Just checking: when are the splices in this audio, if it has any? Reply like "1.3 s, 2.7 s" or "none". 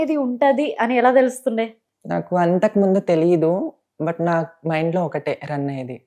none